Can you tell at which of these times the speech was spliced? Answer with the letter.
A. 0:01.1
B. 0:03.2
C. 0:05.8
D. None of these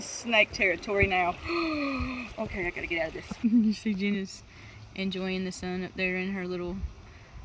B